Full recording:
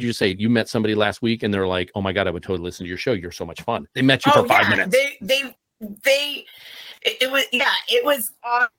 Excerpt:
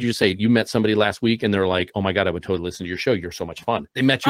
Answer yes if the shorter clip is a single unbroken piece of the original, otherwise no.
yes